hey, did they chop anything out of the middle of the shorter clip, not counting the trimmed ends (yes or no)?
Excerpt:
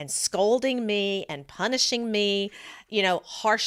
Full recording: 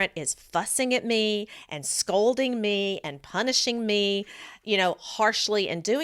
no